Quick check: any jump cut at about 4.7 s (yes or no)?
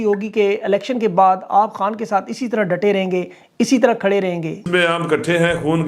yes